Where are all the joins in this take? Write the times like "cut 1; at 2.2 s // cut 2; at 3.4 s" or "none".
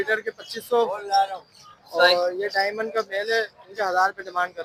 none